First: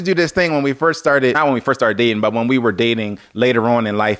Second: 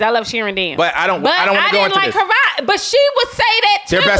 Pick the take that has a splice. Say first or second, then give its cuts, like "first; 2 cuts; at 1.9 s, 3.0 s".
first; 1 cut; at 1.4 s